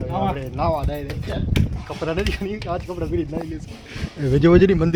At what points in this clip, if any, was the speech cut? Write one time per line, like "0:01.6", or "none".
none